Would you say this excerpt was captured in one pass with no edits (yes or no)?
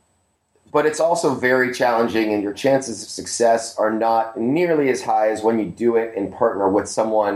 yes